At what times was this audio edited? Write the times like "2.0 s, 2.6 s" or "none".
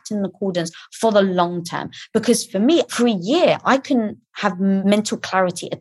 2.9 s, 4.8 s

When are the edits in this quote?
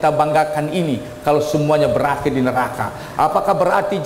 none

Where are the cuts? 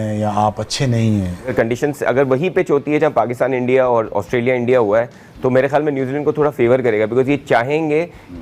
1.4 s

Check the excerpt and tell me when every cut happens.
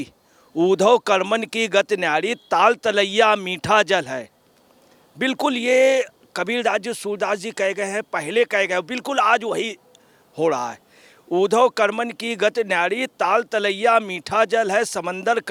none

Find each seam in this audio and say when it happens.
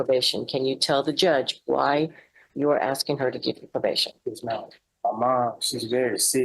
4.8 s

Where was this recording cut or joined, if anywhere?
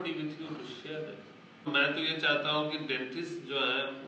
1.6 s

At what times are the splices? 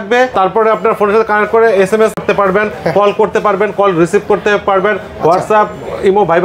none

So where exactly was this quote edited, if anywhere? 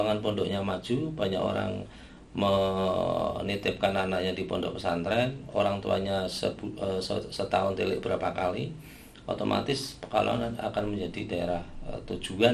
none

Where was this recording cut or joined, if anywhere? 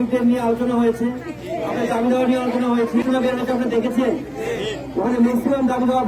3.0 s

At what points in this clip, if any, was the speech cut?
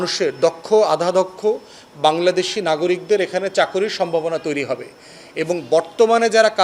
none

